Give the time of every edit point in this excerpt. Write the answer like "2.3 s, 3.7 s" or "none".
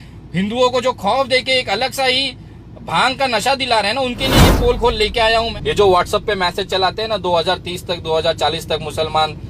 5.5 s